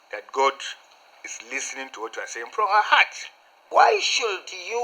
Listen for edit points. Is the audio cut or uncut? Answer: cut